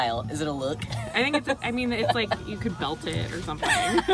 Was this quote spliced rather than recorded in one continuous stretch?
no; 0 cuts

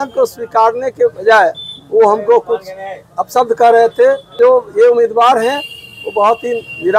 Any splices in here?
yes; 1 cut; at 4.3 s

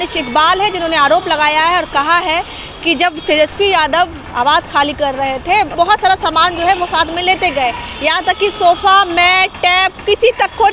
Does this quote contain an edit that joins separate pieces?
yes; 1 cut; at 5.7 s

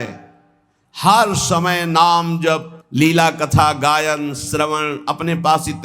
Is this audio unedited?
yes; 0 cuts

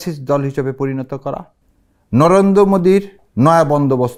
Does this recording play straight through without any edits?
yes; 0 cuts

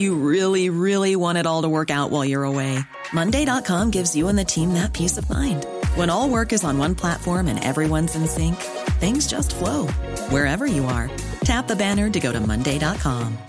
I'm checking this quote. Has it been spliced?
no; 0 cuts

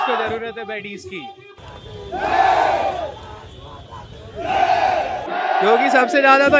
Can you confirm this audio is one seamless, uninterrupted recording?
yes; 0 cuts

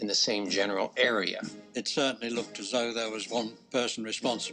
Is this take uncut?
no; 2 cuts; at 1.5 s, 3.6 s

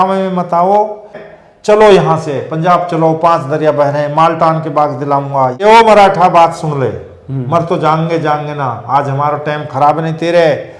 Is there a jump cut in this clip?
yes; 2 cuts; at 1.2 s, 5.6 s

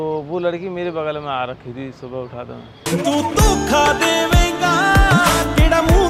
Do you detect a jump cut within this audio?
no; 0 cuts

